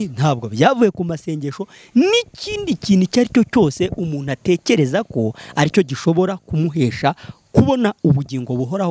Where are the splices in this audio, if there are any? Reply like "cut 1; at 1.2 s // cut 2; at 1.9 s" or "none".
none